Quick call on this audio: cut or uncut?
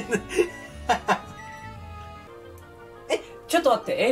cut